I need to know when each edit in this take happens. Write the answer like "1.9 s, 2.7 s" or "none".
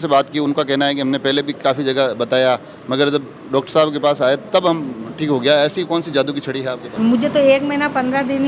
7.0 s